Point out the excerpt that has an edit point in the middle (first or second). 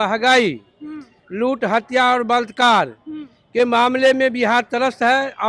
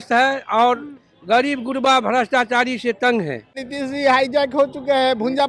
second